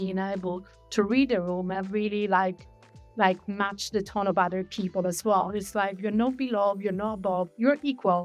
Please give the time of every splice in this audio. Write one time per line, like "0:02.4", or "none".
none